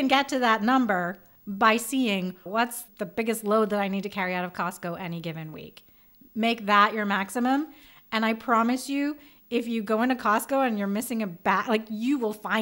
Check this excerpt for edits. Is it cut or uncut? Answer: uncut